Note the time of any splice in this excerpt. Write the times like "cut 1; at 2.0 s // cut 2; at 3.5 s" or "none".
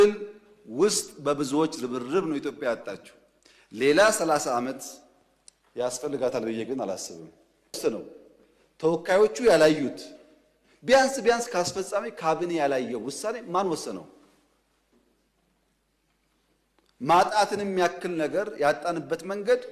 cut 1; at 7.8 s